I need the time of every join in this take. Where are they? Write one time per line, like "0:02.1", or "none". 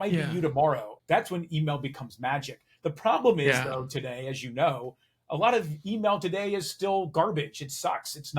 0:00.9